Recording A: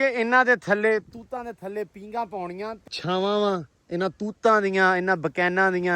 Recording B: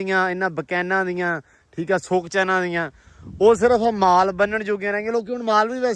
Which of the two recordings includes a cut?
A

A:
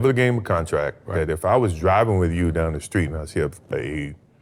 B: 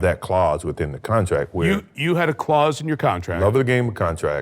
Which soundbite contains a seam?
B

